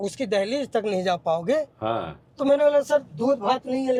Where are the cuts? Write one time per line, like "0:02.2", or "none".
none